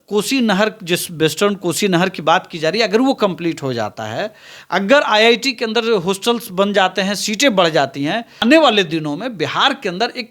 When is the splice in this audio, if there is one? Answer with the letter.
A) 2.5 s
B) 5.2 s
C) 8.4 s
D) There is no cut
C